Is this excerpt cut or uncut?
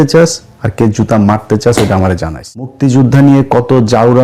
cut